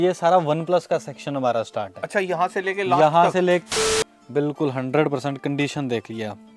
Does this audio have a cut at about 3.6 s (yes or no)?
yes